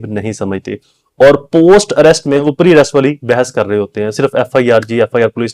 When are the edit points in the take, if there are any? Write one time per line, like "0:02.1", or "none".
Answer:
0:02.4